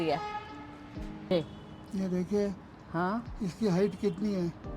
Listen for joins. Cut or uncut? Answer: cut